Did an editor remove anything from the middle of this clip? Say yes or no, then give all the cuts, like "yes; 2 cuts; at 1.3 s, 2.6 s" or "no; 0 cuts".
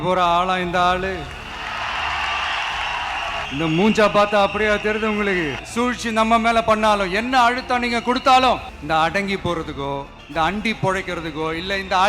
yes; 4 cuts; at 3.5 s, 5.6 s, 8.7 s, 10.2 s